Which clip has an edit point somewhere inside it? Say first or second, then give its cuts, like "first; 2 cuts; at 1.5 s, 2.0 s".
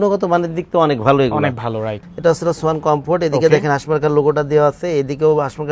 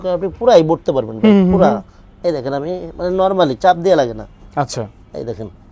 first; 1 cut; at 2.0 s